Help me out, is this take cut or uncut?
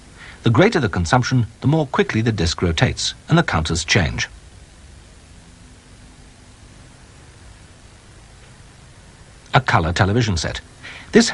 cut